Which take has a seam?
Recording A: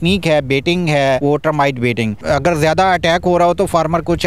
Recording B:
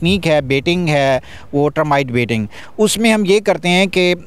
A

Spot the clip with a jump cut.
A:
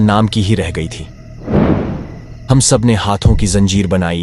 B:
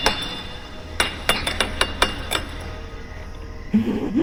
A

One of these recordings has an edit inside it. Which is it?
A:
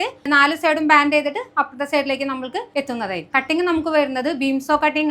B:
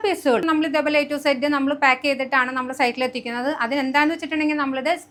A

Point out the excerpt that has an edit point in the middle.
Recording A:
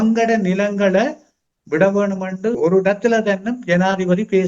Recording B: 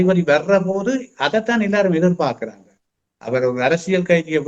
A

